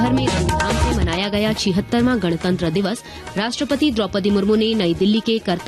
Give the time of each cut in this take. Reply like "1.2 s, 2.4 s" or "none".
none